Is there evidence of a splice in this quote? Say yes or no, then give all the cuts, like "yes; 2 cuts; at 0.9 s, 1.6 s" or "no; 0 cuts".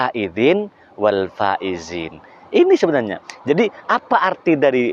no; 0 cuts